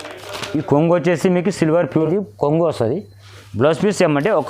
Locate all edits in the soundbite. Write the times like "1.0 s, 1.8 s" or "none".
1.9 s

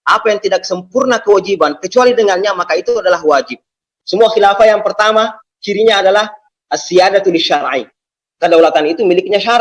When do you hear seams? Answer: 3.9 s

